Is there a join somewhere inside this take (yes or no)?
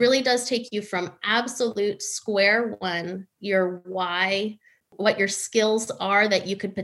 yes